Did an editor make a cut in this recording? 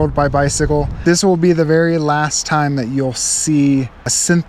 yes; 1 cut; at 1.0 s

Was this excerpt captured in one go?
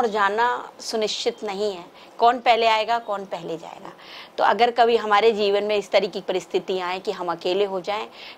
yes; 0 cuts

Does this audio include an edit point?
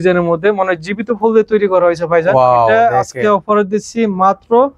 no; 0 cuts

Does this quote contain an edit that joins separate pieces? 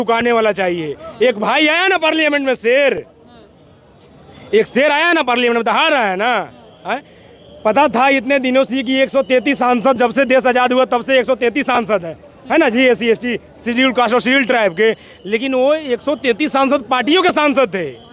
no; 0 cuts

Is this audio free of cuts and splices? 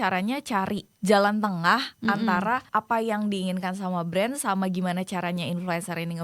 no; 2 cuts; at 0.9 s, 2.6 s

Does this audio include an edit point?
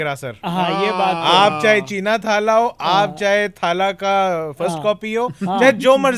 no; 0 cuts

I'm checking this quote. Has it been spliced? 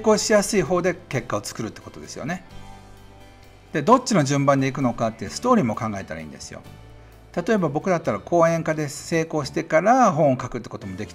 no; 0 cuts

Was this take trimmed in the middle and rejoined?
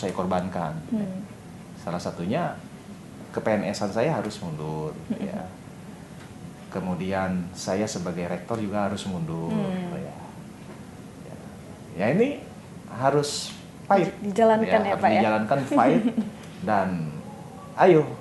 no; 0 cuts

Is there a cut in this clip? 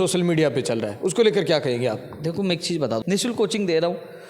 yes; 1 cut; at 2.5 s

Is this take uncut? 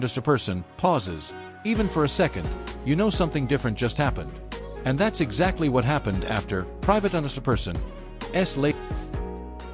no; 1 cut; at 8.7 s

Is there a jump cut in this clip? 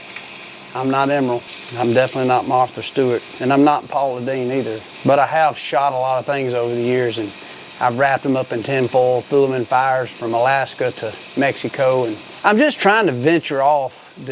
yes; 4 cuts; at 1.6 s, 3.3 s, 4.8 s, 12.2 s

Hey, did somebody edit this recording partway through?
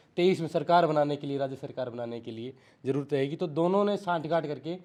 no; 0 cuts

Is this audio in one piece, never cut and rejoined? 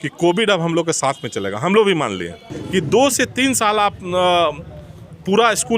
no; 1 cut; at 2.5 s

